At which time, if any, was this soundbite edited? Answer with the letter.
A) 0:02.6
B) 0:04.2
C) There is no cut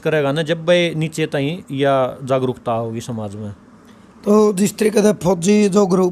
C